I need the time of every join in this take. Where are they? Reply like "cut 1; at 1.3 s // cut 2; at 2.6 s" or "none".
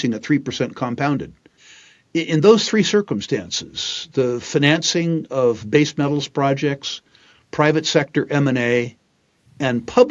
cut 1; at 1.6 s